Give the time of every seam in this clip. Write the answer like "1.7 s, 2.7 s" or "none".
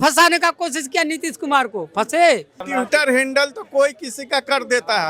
2.6 s